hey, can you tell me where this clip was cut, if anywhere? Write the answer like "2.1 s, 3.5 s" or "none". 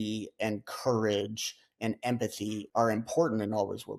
2.6 s